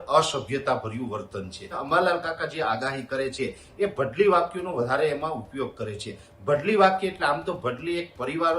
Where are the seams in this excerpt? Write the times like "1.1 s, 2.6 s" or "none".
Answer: 1.8 s